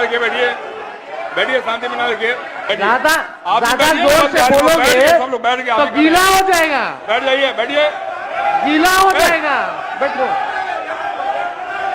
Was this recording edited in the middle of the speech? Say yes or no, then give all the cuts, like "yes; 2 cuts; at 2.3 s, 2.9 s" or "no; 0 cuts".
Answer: yes; 1 cut; at 2.6 s